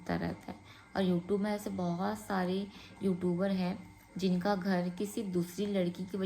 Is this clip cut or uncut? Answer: uncut